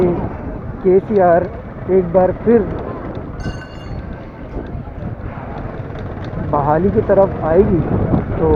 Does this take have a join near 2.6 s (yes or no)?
no